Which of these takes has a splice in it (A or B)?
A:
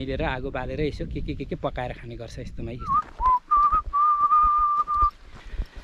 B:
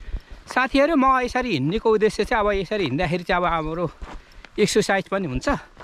A